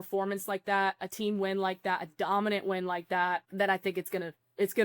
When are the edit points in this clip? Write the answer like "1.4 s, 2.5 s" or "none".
3.5 s